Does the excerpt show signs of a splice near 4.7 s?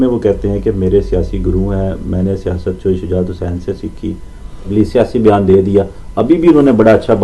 yes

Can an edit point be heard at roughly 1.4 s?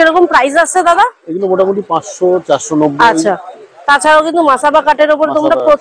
no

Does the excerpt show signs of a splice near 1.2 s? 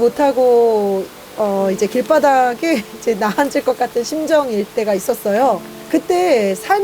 no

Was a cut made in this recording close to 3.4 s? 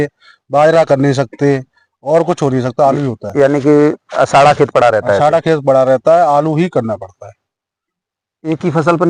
no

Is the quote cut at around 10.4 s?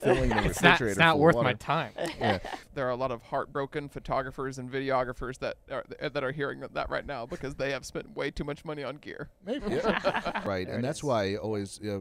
yes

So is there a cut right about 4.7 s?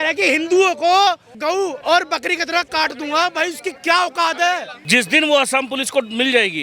yes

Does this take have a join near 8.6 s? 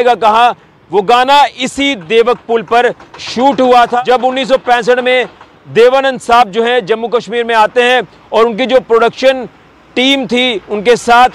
no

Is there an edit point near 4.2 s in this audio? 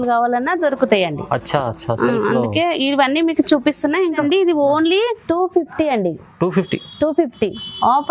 yes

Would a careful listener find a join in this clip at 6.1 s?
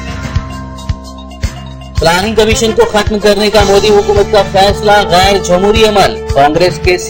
no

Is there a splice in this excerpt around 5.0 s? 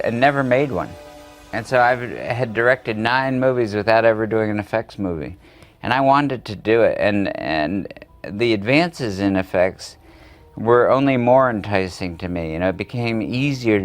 yes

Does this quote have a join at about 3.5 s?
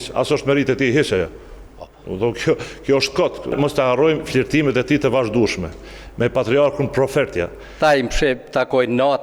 yes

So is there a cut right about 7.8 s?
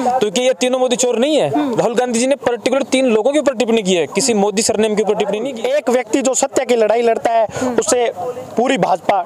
no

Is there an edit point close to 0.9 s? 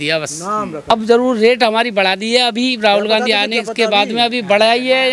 yes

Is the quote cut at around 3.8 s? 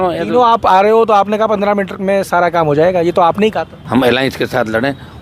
yes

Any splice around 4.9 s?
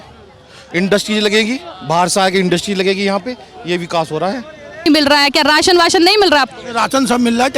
yes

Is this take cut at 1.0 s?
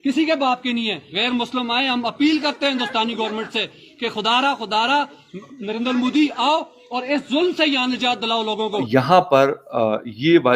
yes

